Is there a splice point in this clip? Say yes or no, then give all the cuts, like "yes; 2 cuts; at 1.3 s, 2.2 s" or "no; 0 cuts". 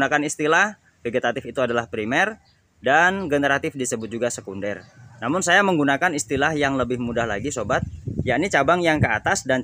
yes; 1 cut; at 8.0 s